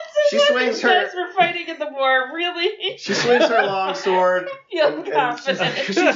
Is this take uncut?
yes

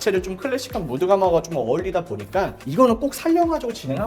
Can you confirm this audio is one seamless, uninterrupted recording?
yes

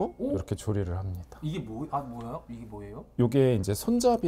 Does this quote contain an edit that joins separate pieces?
no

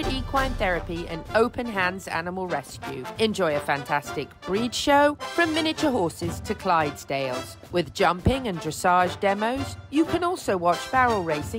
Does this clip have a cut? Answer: no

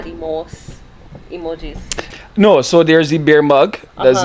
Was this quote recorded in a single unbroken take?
no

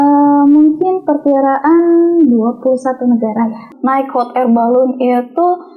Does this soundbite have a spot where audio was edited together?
yes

